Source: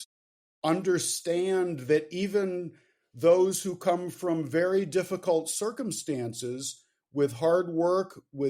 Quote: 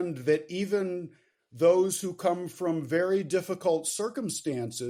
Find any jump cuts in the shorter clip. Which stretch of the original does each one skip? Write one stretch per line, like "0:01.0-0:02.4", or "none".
none